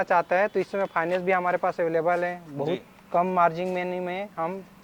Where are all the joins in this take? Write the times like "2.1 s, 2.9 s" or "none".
none